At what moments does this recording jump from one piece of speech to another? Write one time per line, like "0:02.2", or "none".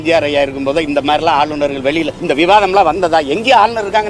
0:02.2

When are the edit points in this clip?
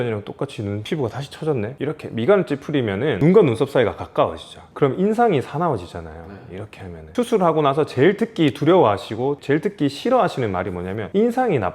0:01.7
0:07.1

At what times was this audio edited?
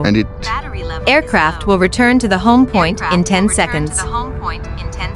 none

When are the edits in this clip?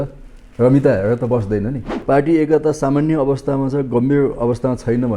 0:01.9

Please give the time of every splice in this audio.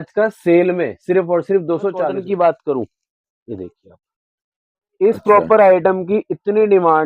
0:02.2

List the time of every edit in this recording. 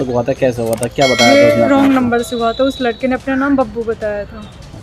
0:03.8

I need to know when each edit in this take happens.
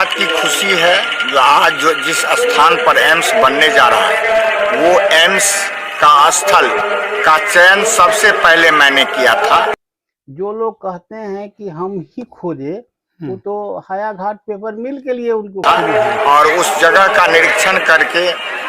0:09.8
0:15.6

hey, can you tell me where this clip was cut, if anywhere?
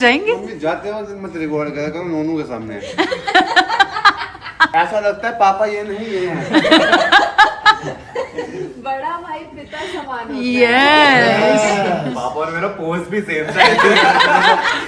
0:04.7

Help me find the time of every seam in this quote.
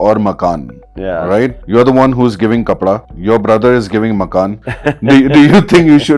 0:01.6
0:03.1
0:04.7

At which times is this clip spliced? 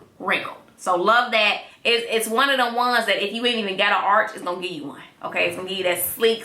0:01.7

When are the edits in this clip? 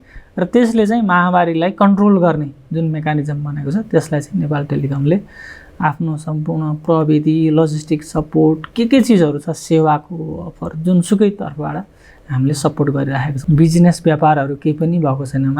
0:13.3

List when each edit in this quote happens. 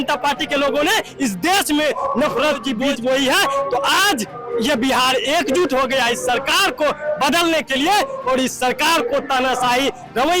0:02.9

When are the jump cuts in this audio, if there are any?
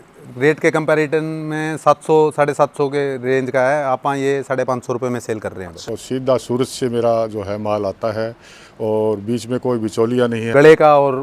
0:05.8
0:10.4

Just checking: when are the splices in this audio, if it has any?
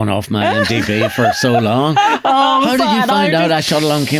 none

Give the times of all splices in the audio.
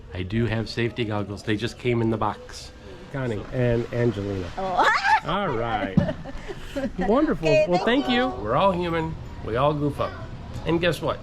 0:03.1
0:08.4

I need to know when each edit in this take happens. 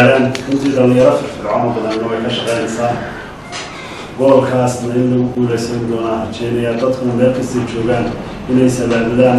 none

